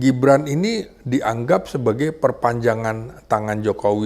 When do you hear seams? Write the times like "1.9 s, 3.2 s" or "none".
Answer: none